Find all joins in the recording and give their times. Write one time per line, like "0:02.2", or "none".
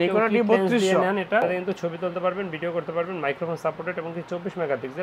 0:01.4